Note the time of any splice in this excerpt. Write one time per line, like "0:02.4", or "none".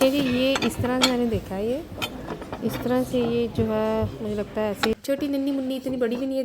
0:04.9